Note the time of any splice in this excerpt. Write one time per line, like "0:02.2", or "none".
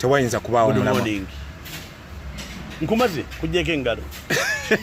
none